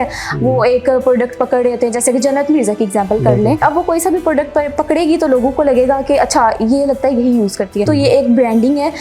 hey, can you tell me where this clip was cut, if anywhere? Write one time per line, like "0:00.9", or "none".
0:03.6
0:07.9